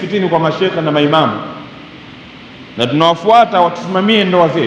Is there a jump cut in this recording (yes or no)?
no